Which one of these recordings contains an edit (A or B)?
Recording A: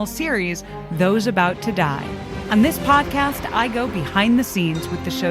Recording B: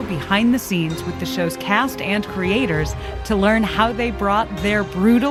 A